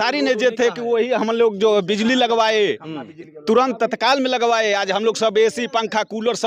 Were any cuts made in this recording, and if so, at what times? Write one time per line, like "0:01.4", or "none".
none